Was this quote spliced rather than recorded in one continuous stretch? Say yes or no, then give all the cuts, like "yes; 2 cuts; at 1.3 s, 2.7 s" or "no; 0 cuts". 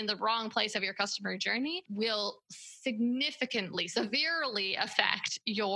yes; 1 cut; at 1.8 s